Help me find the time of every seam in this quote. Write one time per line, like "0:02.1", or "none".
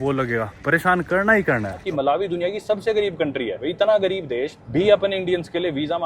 0:01.8
0:03.6
0:04.6